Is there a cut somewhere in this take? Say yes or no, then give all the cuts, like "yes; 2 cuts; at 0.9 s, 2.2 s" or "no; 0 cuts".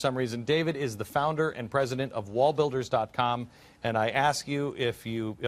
no; 0 cuts